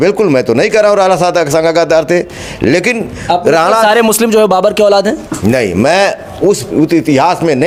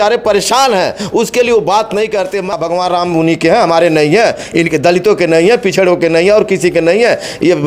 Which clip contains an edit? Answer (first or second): second